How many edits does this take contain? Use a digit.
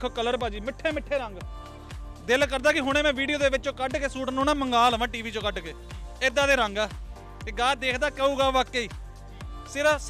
0